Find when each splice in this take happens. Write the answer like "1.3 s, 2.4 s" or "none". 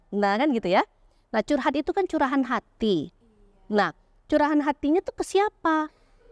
none